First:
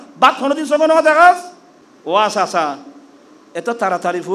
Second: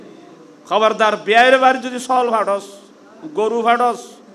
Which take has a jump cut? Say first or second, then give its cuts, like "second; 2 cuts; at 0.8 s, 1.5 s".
first; 1 cut; at 1.4 s